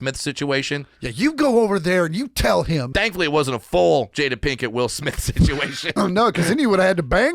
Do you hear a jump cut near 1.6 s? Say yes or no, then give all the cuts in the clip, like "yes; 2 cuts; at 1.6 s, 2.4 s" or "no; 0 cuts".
no; 3 cuts; at 2.9 s, 4.1 s, 5.8 s